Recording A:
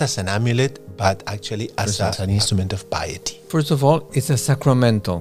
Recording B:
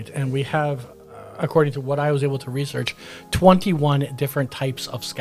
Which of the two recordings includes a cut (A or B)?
A